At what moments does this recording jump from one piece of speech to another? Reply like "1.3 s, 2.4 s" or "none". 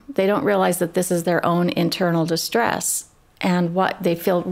none